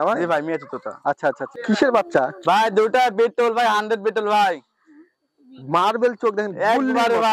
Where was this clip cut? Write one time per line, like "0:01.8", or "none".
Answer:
0:01.5